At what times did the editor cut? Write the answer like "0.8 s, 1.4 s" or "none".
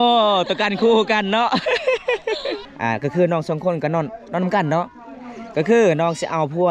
2.6 s